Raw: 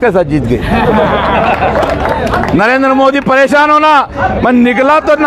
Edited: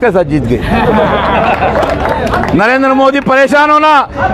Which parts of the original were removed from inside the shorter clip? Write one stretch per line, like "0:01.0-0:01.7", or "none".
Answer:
none

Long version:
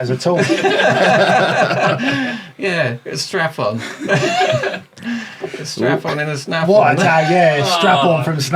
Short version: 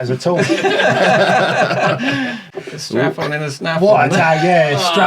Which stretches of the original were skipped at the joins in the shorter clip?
0:02.5-0:05.3

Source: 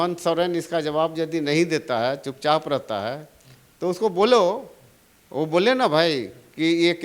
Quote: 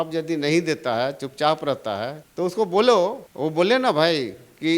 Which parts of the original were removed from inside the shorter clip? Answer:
0:03.2-0:03.6
0:04.7-0:05.2

